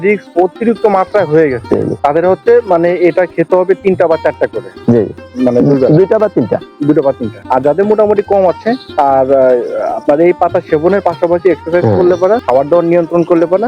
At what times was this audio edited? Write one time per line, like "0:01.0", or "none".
0:01.9
0:07.3
0:08.8
0:12.4